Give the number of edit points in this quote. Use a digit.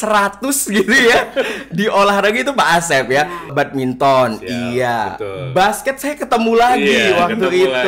1